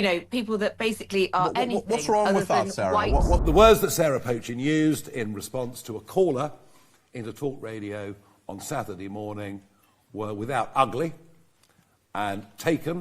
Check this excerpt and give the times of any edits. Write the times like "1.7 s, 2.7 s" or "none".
3.4 s